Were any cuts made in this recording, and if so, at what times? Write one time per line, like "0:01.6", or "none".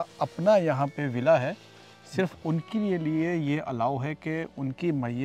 none